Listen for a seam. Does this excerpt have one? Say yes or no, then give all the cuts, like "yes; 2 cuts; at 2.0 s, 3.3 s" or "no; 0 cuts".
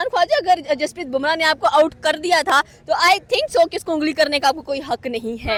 no; 0 cuts